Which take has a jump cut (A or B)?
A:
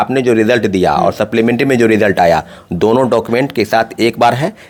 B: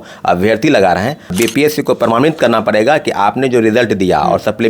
B